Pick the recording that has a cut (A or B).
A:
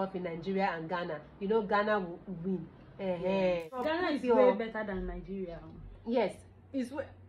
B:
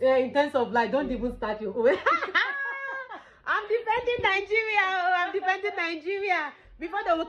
A